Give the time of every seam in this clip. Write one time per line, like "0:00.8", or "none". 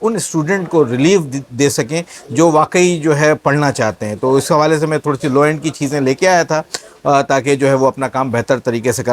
none